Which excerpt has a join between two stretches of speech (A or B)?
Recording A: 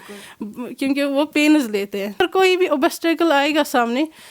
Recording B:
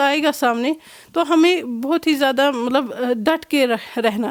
A